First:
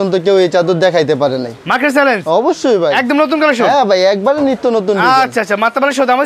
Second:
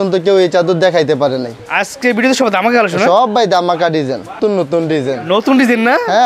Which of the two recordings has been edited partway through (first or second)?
second